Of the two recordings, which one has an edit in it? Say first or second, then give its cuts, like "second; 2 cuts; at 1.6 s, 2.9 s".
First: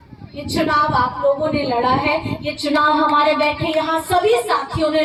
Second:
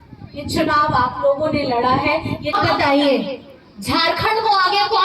second; 1 cut; at 2.6 s